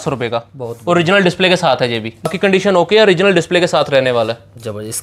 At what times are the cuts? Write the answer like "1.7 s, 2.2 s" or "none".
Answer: 2.3 s